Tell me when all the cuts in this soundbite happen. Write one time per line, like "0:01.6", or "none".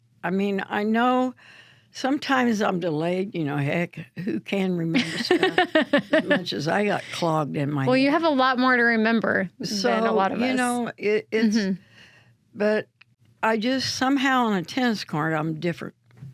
none

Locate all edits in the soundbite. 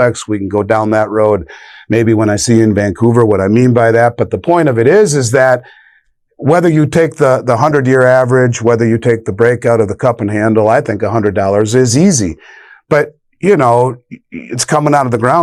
none

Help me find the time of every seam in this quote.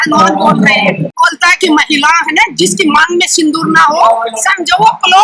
0:01.1

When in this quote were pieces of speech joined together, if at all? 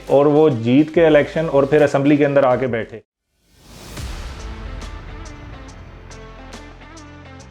0:03.0

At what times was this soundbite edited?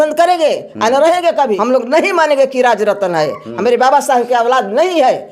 0:01.6

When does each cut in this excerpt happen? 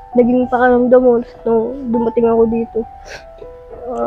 none

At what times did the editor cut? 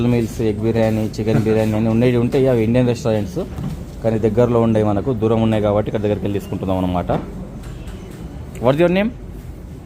0:08.1

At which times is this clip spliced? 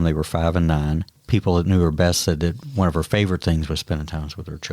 0:01.2

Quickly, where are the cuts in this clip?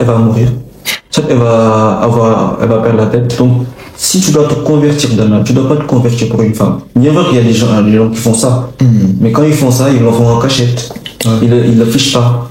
0:03.4

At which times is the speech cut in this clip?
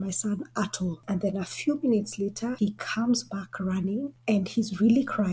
0:01.0
0:02.5

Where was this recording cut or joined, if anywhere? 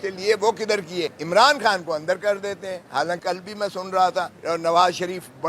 0:01.2
0:03.2
0:04.4

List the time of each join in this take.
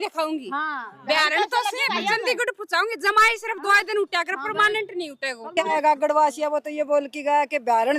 0:05.7

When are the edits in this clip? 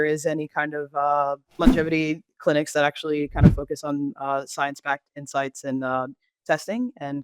0:01.5

